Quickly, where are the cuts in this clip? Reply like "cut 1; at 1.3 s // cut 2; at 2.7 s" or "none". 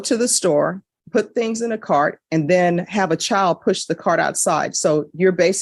none